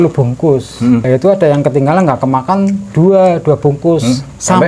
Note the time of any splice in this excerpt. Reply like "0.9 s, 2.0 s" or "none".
1.0 s